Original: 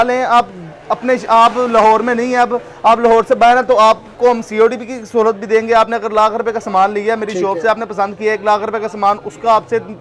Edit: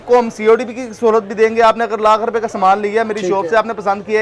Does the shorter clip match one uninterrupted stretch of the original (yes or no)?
yes